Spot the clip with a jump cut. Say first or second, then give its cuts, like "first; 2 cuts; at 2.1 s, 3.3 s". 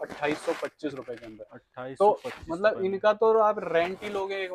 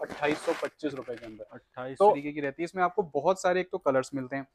second; 1 cut; at 2.2 s